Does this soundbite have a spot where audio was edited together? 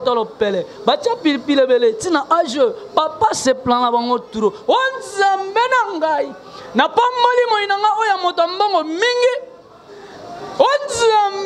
no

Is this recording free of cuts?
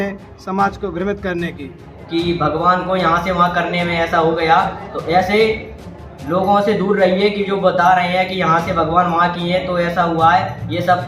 no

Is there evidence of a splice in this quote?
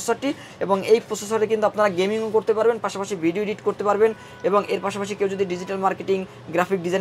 no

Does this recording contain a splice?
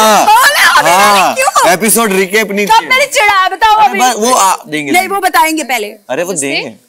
no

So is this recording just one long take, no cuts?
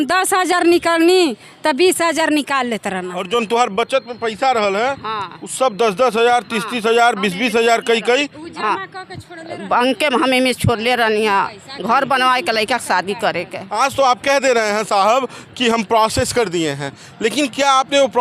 no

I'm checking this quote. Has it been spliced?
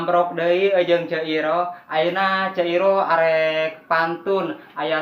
no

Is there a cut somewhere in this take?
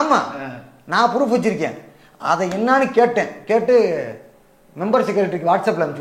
no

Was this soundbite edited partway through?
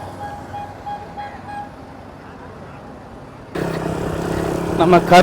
yes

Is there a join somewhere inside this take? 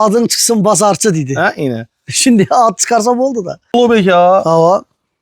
yes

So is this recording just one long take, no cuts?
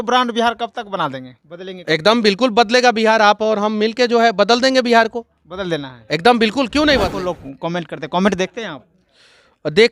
no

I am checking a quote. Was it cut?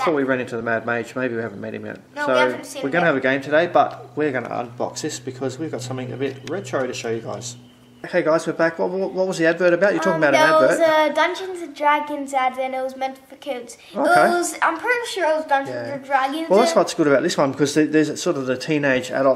yes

